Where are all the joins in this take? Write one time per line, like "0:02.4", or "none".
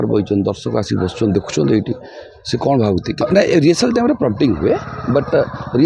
0:03.2